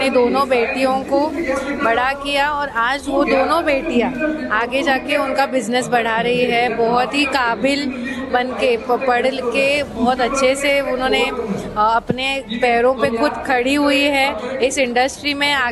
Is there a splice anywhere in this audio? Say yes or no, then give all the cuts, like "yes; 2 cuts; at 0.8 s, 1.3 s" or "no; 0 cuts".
no; 0 cuts